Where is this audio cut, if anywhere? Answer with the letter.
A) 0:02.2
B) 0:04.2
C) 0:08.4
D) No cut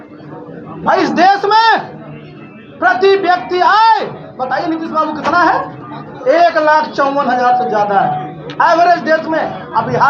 D